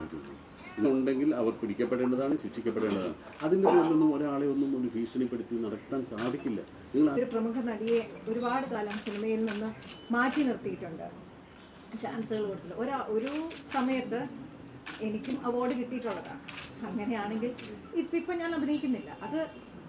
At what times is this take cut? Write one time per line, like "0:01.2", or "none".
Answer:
0:00.8
0:07.2